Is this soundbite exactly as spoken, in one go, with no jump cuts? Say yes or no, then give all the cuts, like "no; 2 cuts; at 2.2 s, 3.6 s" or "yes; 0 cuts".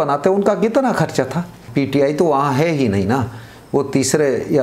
no; 1 cut; at 1.6 s